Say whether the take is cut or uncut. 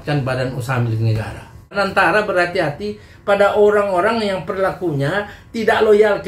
cut